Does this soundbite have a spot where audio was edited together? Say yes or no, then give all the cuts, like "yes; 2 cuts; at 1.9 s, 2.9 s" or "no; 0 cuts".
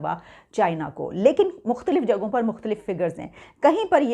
no; 0 cuts